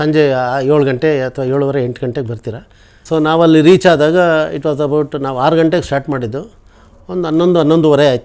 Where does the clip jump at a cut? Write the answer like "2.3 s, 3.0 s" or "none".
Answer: 3.1 s